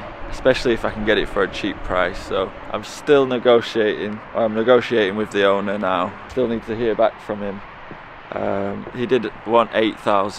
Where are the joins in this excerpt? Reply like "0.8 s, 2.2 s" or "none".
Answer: none

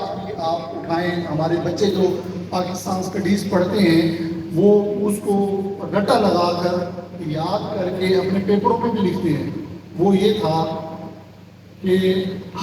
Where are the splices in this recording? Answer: none

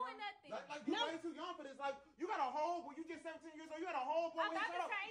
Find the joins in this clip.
none

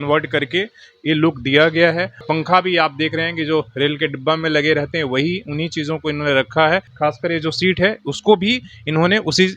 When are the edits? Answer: 2.2 s, 6.9 s

